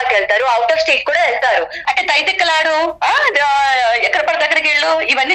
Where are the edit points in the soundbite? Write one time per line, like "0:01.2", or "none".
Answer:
0:01.8